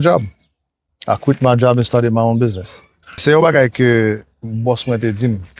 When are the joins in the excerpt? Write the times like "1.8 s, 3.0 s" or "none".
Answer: 3.2 s